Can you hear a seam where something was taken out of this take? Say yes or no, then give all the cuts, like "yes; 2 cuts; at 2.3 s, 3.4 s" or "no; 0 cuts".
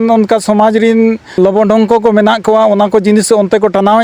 yes; 1 cut; at 1.4 s